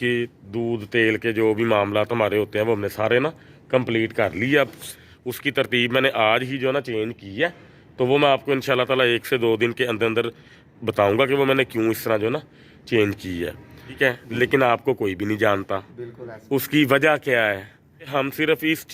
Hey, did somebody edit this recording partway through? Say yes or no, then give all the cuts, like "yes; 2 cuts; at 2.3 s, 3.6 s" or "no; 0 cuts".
yes; 3 cuts; at 4.8 s, 14.0 s, 18.1 s